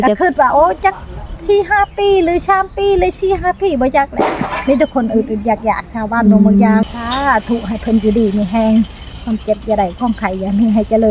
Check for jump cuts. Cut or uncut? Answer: cut